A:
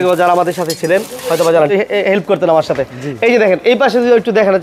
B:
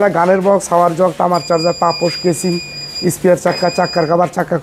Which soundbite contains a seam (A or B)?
A